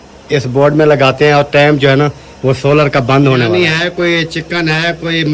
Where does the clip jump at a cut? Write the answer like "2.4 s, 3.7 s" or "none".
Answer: 3.5 s